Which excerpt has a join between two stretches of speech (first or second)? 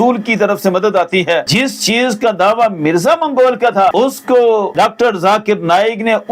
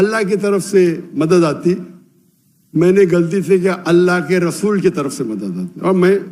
first